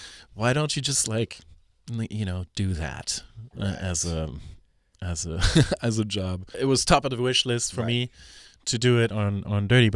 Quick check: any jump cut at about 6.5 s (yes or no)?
yes